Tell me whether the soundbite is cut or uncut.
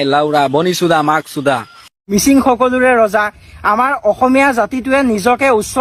cut